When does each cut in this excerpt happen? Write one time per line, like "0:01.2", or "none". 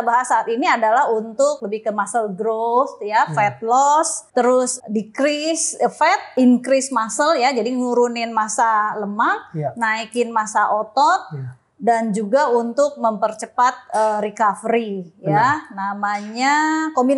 0:01.6
0:04.5
0:06.3